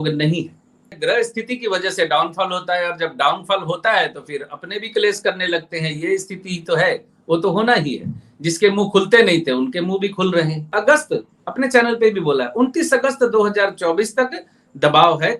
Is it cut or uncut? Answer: cut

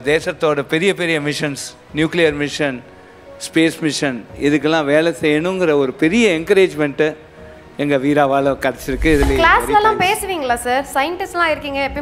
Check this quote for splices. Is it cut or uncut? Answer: cut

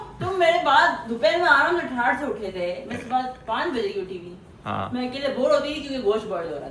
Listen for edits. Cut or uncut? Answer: uncut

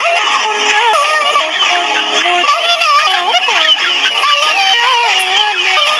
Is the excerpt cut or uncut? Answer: uncut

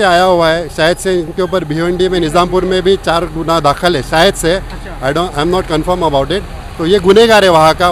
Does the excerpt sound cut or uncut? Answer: uncut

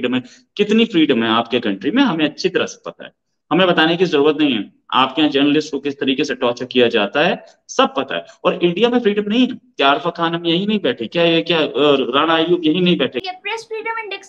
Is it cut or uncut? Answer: cut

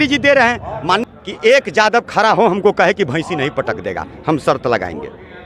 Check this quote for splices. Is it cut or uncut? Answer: cut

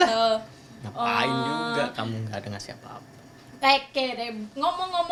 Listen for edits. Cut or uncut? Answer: uncut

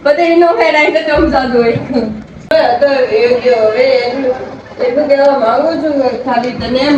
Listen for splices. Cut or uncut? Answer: cut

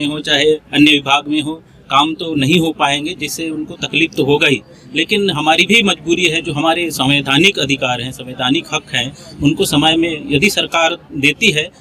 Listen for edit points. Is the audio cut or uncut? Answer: uncut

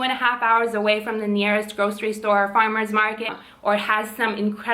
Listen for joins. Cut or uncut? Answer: cut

